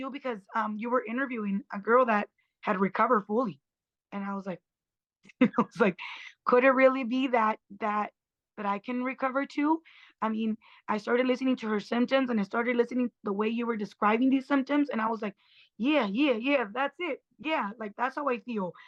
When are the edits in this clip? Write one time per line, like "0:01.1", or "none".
none